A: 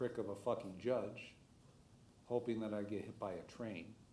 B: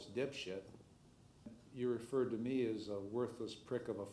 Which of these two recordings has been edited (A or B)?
B